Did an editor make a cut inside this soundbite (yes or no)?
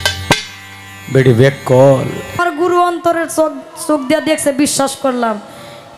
yes